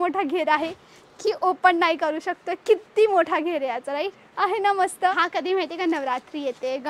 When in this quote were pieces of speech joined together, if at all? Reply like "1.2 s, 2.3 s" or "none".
4.2 s, 5.1 s